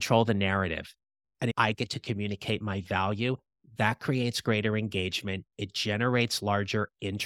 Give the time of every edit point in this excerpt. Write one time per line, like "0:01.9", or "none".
0:01.5

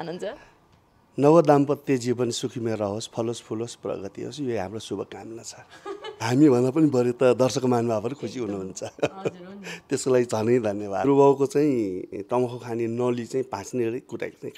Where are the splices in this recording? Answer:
0:06.2
0:11.0

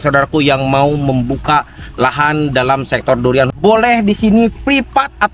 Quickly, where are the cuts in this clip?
0:03.5

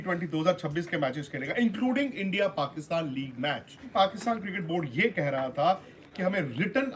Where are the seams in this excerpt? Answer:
0:03.9

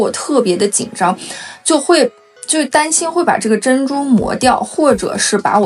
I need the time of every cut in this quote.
none

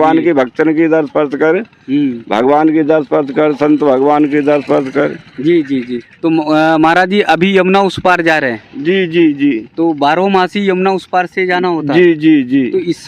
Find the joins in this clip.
0:06.1

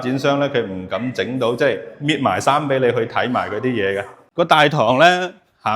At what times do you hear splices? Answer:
0:04.2

